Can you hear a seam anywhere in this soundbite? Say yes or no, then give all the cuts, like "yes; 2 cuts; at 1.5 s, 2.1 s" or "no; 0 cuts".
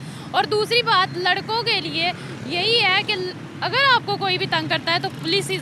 no; 0 cuts